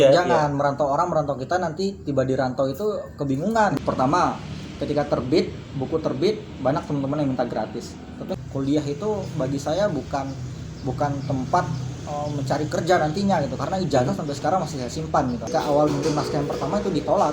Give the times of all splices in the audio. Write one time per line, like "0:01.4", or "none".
0:03.7
0:08.3
0:15.4